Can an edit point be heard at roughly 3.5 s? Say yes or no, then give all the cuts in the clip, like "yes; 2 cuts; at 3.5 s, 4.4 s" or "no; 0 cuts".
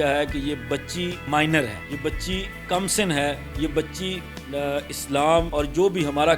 no; 0 cuts